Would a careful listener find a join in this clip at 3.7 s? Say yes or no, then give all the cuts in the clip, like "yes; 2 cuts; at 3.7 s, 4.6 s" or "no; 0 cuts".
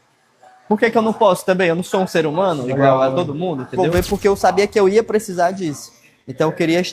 yes; 1 cut; at 3.7 s